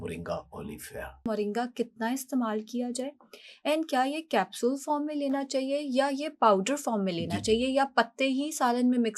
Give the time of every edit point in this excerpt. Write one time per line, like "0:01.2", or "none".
0:01.3